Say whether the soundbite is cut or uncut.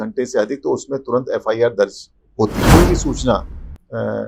cut